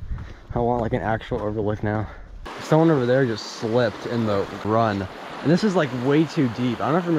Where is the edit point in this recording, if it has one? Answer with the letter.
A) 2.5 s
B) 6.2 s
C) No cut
A